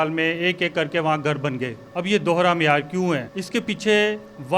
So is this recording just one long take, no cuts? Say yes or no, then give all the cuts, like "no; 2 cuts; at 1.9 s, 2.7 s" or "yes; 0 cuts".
no; 2 cuts; at 1.8 s, 3.3 s